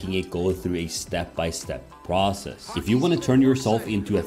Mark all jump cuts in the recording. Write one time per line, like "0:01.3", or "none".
0:02.7